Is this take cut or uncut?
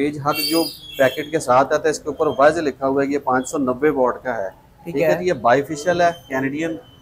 uncut